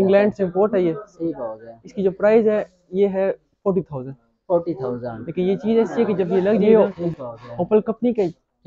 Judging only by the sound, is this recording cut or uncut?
cut